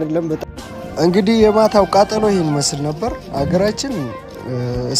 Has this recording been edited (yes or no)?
no